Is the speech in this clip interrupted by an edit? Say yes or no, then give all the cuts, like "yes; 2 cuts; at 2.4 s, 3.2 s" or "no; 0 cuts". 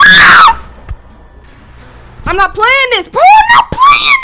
no; 0 cuts